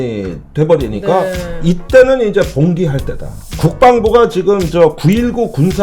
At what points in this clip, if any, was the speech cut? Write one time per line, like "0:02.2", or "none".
0:03.4